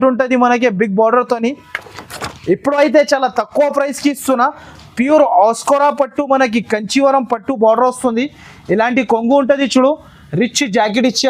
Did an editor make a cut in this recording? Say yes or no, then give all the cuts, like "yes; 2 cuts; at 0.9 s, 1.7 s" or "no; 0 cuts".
yes; 1 cut; at 2.3 s